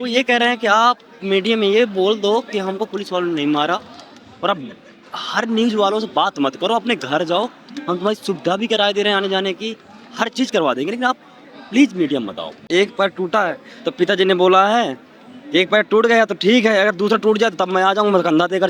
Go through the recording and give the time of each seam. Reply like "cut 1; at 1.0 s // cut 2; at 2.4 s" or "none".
cut 1; at 12.6 s